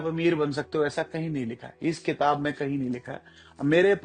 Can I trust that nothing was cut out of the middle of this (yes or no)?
yes